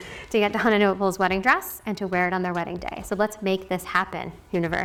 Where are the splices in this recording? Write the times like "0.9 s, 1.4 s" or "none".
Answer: none